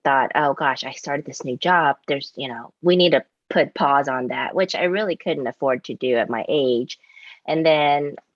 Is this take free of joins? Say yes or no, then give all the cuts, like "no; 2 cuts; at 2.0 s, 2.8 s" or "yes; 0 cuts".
yes; 0 cuts